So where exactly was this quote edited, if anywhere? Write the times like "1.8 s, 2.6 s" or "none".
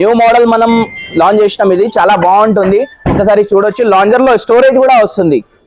none